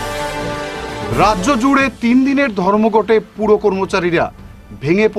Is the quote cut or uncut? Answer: cut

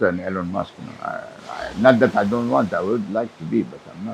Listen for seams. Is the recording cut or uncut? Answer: uncut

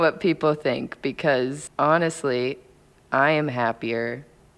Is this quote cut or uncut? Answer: cut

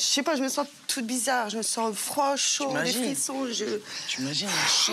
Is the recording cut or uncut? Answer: uncut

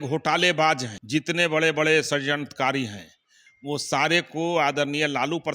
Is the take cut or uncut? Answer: cut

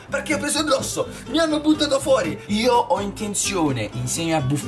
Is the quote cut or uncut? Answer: cut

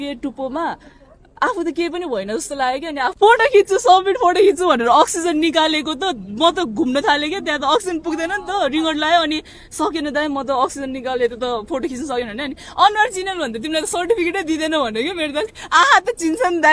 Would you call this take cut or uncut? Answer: cut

